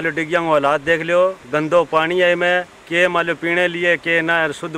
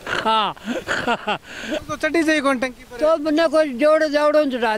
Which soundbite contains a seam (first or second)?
second